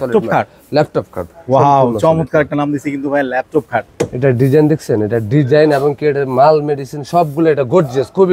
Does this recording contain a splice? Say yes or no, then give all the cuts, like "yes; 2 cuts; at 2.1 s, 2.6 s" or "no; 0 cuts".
no; 0 cuts